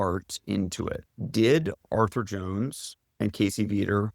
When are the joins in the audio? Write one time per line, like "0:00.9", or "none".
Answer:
0:01.0